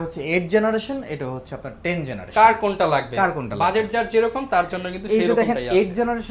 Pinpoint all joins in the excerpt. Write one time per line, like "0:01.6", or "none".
none